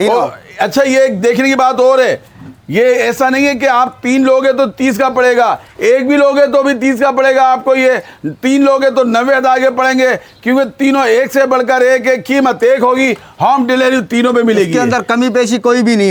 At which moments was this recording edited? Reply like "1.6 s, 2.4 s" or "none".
none